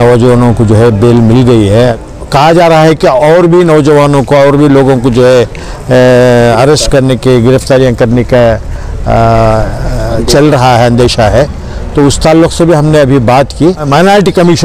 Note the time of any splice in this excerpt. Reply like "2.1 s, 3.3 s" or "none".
1.9 s, 13.9 s